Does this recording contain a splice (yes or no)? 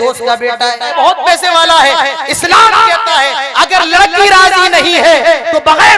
yes